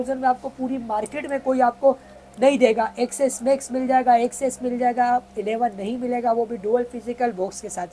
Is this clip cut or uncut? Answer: uncut